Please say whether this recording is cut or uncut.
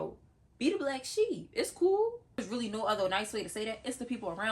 cut